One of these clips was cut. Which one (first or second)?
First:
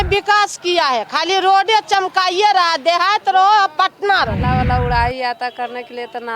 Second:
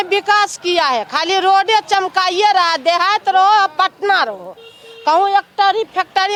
first